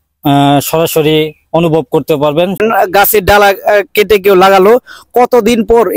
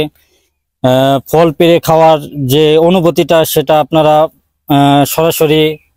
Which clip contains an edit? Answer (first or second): first